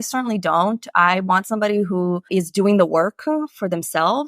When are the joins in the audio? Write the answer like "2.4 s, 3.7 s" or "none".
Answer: 2.3 s